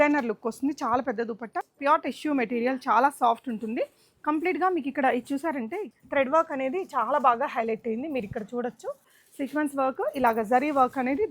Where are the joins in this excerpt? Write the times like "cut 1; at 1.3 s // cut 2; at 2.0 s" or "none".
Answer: cut 1; at 1.6 s // cut 2; at 5.8 s // cut 3; at 9.2 s